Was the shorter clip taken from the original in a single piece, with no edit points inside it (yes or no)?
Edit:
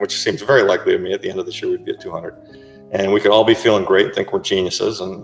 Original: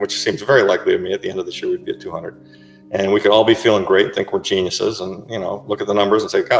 yes